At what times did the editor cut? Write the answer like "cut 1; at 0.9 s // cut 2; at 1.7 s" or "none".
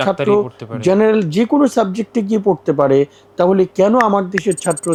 none